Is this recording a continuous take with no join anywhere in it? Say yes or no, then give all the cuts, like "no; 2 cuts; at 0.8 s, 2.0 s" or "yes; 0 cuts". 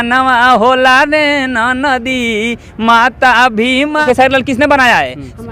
no; 1 cut; at 4.0 s